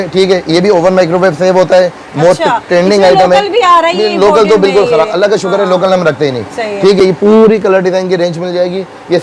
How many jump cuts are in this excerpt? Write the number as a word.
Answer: zero